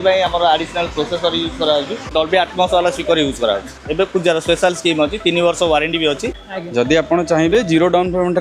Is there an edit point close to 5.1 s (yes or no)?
no